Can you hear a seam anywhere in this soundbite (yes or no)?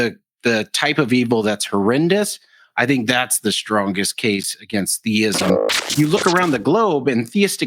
yes